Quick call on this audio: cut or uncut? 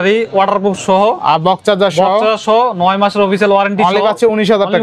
uncut